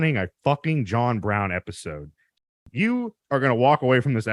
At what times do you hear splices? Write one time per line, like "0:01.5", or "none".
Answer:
0:02.4